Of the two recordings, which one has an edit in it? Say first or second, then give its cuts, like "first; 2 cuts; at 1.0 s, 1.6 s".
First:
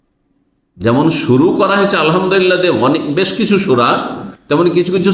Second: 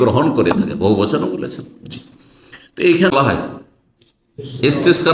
second; 1 cut; at 3.1 s